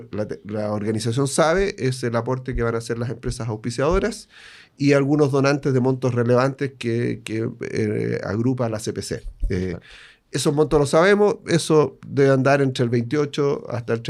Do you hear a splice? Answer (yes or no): no